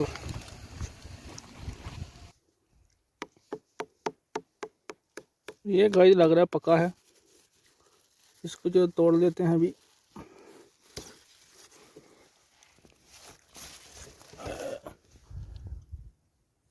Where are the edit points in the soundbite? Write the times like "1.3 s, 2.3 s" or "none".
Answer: 2.2 s